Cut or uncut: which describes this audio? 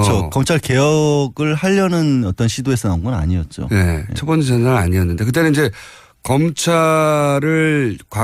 cut